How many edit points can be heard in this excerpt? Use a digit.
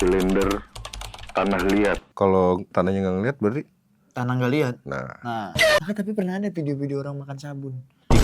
1